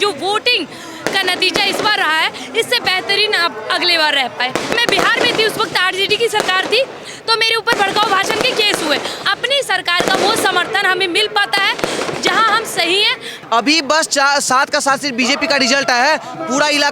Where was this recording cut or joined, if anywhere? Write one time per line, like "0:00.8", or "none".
0:04.7
0:09.2
0:13.3